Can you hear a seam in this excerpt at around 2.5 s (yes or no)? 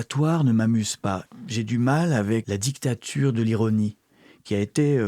yes